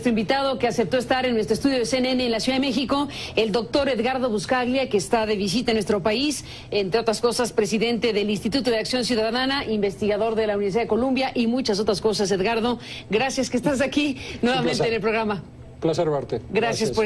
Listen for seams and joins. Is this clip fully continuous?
yes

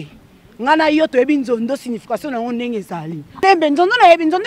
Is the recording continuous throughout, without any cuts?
no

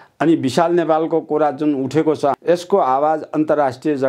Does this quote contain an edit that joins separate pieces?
yes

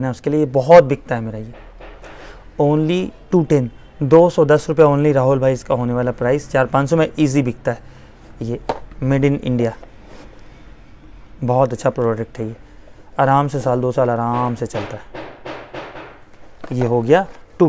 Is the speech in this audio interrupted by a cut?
no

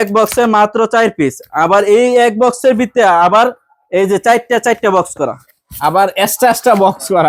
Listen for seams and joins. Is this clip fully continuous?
yes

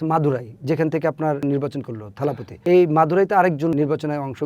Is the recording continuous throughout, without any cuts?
no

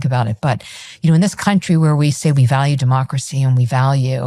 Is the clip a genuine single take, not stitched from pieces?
yes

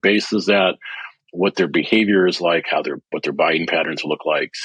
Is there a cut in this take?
no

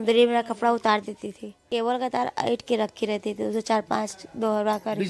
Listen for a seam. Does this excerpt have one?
yes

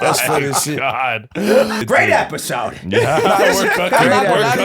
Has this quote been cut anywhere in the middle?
yes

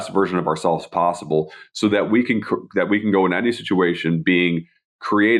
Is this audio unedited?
yes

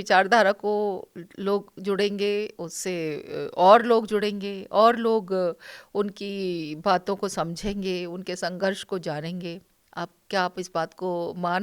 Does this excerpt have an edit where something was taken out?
no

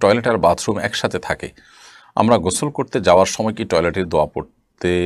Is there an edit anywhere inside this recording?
no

